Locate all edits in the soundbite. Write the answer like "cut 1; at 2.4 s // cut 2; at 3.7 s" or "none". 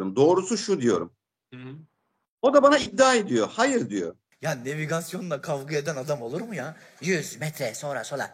cut 1; at 4.3 s